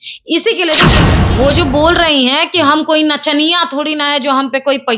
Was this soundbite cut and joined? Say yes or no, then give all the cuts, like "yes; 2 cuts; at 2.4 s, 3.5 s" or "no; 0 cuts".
yes; 1 cut; at 1.1 s